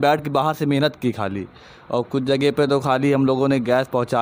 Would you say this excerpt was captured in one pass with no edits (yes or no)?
yes